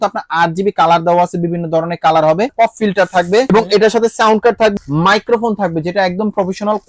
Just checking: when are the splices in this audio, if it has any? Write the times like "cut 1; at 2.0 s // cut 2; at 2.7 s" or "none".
cut 1; at 2.5 s // cut 2; at 3.5 s // cut 3; at 4.7 s